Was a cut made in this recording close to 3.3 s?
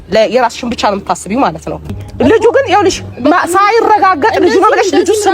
no; 1 cut; at 1.9 s

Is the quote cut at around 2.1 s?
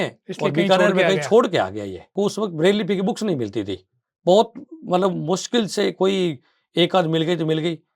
yes; 1 cut; at 2.1 s

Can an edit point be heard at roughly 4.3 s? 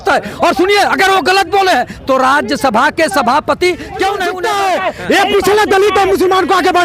yes; 1 cut; at 4.3 s

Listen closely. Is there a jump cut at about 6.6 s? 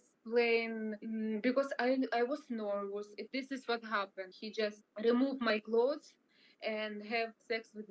no; 0 cuts

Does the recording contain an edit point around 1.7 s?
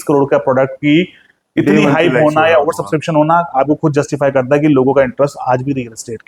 no; 0 cuts

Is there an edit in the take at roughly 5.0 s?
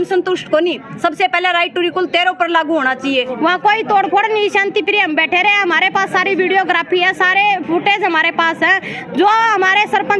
no; 1 cut; at 3.3 s

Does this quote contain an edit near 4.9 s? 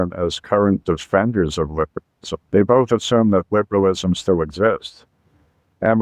no; 1 cut; at 2.4 s

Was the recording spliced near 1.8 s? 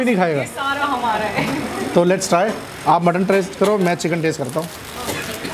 no; 0 cuts

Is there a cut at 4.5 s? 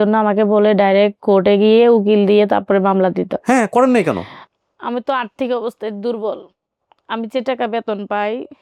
no; 0 cuts

